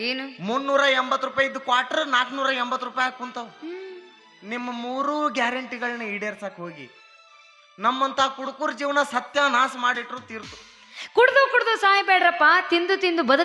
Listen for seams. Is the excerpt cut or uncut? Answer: uncut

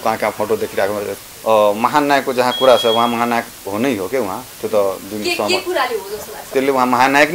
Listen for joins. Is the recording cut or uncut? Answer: cut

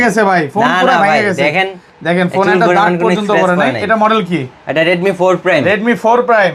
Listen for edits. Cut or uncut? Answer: uncut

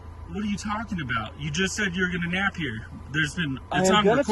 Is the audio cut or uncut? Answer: cut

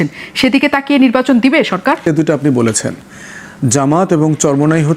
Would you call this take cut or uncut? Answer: cut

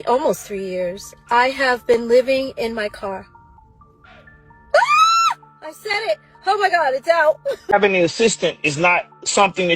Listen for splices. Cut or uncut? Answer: cut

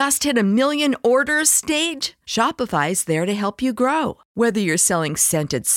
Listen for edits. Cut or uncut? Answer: uncut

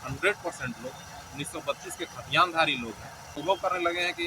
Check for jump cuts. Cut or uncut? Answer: cut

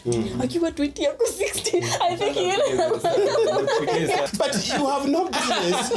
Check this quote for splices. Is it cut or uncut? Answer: cut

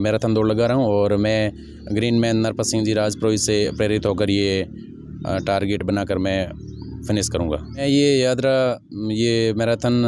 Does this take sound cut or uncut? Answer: cut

